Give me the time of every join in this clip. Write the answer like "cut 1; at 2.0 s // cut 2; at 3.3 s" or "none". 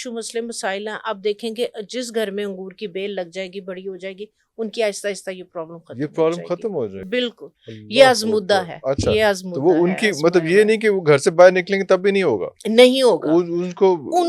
none